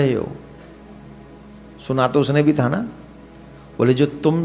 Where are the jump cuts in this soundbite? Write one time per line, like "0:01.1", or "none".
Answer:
none

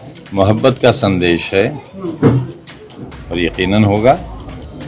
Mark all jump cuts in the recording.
none

